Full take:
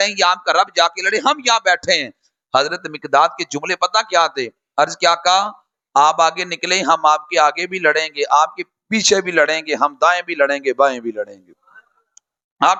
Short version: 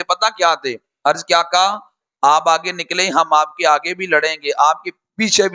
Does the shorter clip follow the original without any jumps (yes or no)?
yes